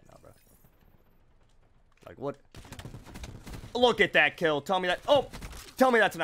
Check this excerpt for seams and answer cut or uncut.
uncut